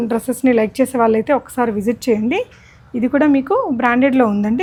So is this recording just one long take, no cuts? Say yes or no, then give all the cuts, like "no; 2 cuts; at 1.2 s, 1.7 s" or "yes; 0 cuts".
yes; 0 cuts